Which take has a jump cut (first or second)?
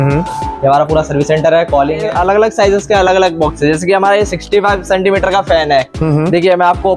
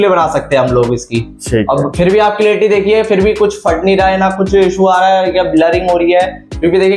first